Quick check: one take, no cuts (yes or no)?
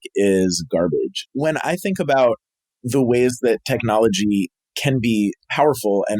no